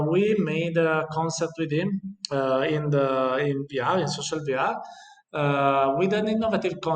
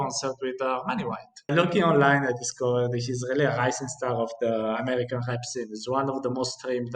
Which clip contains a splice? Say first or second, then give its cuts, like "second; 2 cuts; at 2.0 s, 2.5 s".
second; 1 cut; at 1.5 s